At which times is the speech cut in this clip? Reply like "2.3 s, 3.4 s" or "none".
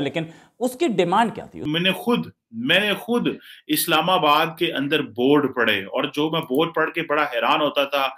1.5 s